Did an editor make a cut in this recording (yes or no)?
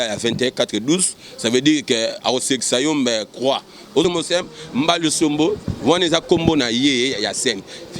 yes